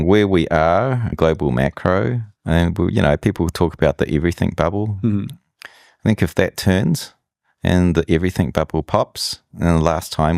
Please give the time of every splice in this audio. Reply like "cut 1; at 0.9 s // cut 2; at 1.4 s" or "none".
cut 1; at 1.1 s // cut 2; at 2.3 s